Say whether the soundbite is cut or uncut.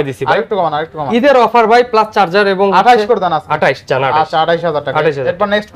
uncut